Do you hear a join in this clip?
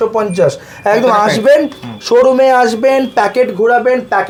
no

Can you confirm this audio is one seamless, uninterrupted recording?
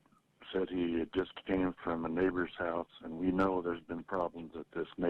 yes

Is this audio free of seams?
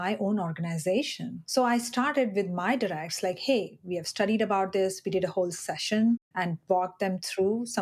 yes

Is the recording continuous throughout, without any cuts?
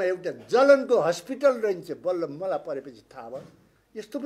yes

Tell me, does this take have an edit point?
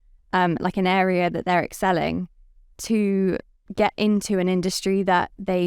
yes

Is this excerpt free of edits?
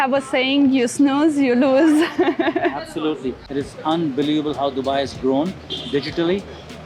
no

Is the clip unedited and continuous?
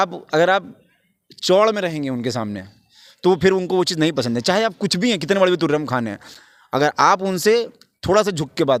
yes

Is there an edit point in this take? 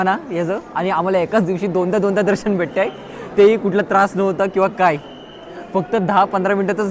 no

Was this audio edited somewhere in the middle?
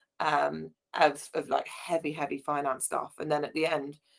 no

